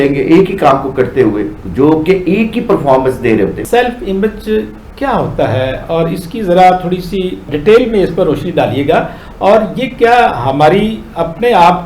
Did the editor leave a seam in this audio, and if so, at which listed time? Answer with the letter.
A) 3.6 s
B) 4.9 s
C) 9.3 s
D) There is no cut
A